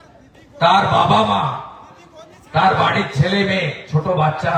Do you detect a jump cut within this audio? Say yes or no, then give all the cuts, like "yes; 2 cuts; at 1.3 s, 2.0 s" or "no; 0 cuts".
no; 0 cuts